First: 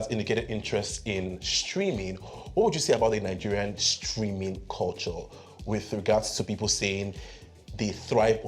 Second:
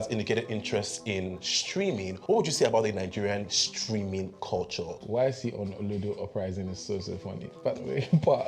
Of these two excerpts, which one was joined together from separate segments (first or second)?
second